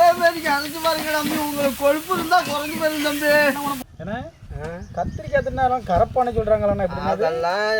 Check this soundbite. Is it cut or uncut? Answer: cut